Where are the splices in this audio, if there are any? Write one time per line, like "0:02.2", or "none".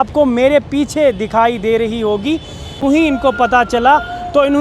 0:02.7